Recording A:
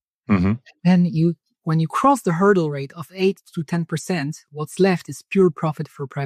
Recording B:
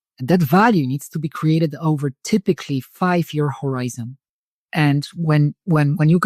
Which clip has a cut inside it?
B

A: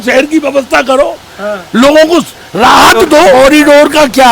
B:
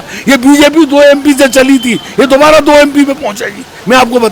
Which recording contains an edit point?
A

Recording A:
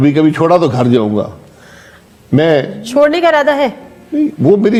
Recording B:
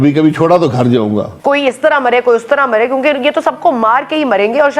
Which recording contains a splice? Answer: B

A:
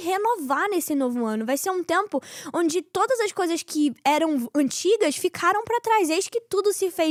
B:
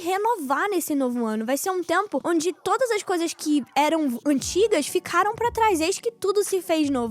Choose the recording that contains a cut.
B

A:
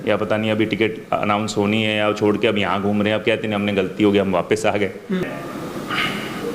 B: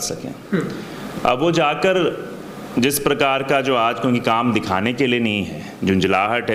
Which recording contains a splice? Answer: A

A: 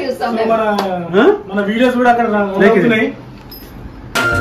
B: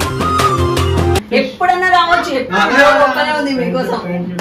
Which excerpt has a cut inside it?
B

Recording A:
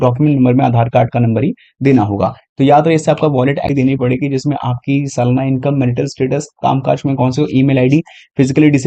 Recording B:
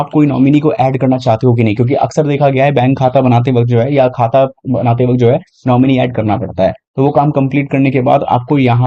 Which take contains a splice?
A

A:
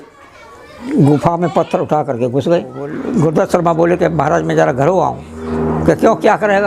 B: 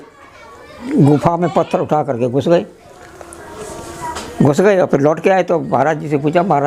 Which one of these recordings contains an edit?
A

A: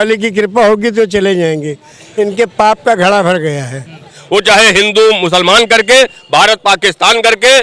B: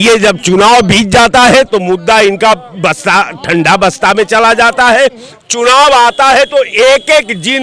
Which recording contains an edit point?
A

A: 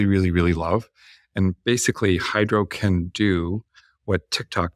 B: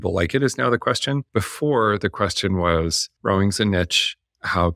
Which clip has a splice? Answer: B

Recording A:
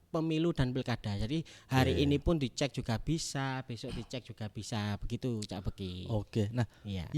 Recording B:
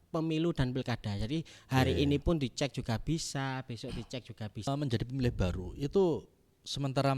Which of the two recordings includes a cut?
B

